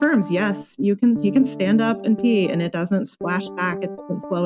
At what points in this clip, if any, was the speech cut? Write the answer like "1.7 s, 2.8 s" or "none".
none